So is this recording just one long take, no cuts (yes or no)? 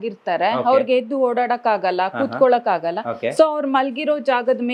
yes